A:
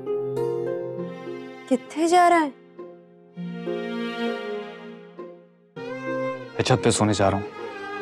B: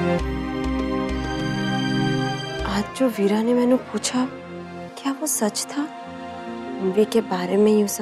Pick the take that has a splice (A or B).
B